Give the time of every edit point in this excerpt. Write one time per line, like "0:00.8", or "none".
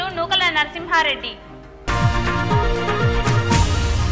none